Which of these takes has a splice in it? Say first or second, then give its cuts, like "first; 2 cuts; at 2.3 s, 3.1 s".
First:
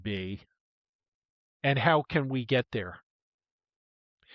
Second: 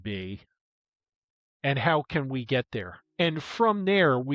second; 1 cut; at 3.0 s